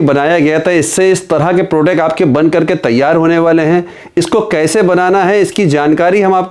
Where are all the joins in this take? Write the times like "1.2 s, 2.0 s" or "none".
none